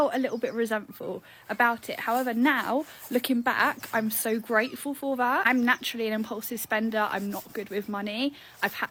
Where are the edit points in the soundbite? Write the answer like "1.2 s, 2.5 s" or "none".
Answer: none